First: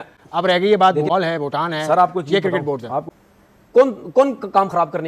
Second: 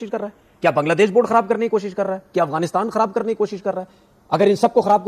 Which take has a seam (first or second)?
first